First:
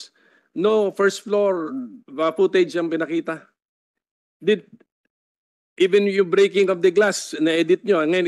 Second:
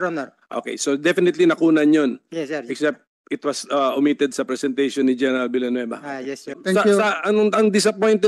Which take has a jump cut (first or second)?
second